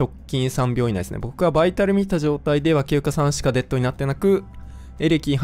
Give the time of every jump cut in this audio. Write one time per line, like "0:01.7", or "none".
none